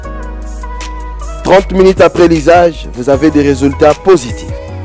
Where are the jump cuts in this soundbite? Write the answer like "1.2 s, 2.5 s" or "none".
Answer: 1.2 s